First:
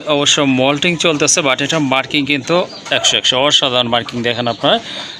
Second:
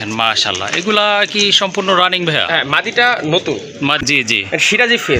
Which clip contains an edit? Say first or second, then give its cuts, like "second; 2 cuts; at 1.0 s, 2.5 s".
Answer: second; 1 cut; at 4.0 s